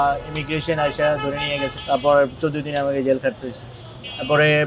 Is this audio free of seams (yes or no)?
yes